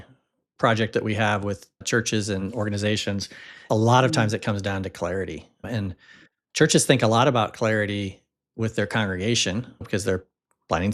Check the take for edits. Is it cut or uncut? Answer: cut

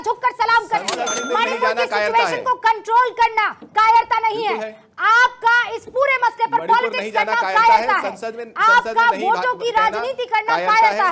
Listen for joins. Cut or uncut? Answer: cut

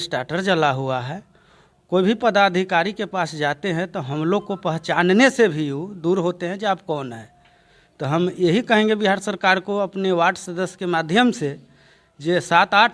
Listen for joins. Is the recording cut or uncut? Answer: uncut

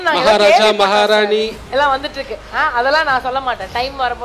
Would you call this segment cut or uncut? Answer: cut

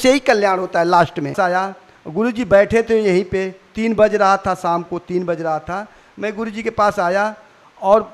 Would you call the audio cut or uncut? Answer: cut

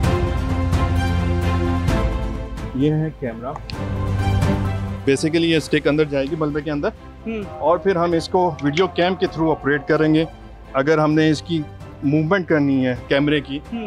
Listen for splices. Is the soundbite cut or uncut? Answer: uncut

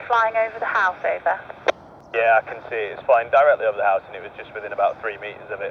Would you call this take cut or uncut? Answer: cut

